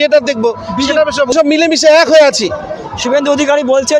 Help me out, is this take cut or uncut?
cut